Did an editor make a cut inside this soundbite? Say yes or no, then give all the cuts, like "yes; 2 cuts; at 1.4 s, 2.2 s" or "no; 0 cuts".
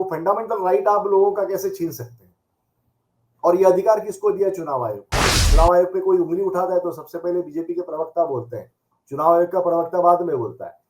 yes; 1 cut; at 5.4 s